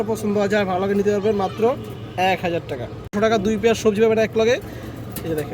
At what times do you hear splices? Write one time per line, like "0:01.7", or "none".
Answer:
0:03.1